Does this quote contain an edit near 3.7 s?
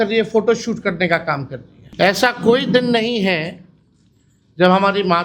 no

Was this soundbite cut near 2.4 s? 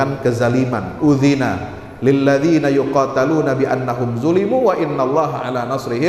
no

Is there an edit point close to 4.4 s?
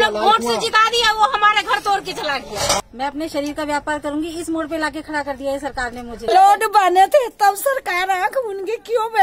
no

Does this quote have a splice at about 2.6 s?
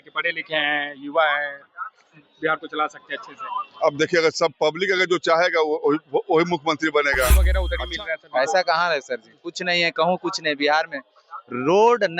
no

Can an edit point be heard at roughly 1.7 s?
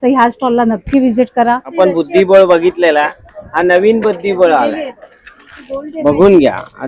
yes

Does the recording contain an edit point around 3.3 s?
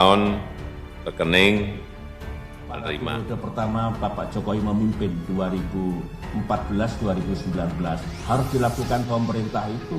yes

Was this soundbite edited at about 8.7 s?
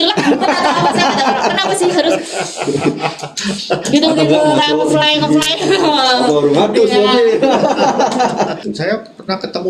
yes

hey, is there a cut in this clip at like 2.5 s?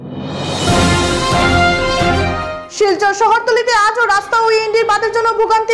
yes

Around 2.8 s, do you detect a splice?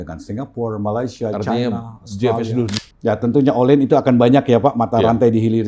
yes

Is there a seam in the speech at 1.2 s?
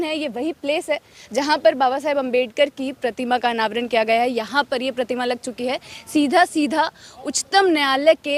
no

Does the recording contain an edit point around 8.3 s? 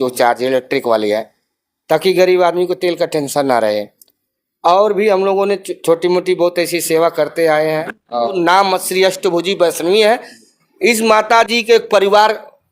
yes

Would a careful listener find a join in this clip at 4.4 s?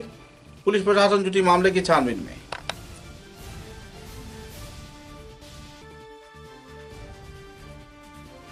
no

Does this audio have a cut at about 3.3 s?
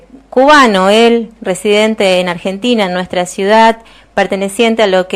yes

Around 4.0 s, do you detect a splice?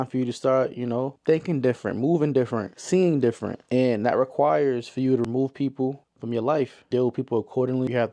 no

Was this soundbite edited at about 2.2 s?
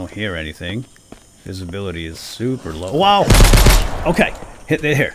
no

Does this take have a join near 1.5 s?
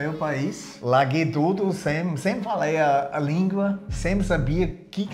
no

